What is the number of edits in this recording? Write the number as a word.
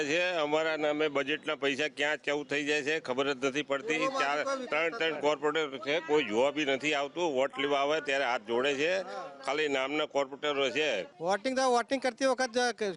zero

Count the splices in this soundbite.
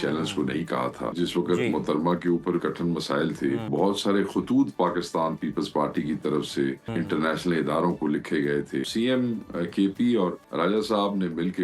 six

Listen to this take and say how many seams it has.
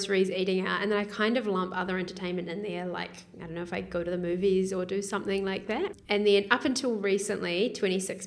one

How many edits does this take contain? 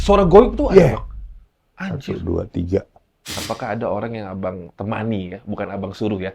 one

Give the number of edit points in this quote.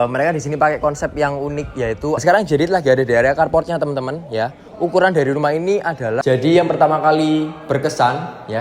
two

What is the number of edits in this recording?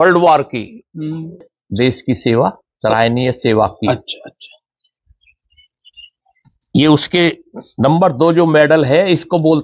one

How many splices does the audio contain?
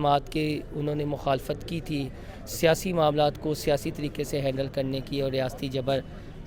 zero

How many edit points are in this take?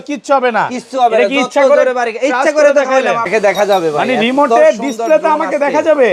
one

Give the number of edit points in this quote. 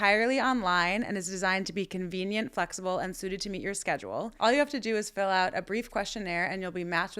zero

